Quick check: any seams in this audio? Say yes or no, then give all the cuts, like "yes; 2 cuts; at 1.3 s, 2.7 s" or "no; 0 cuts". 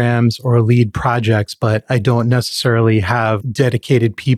yes; 1 cut; at 3.5 s